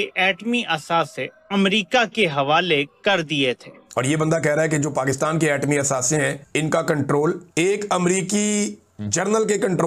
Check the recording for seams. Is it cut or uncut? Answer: cut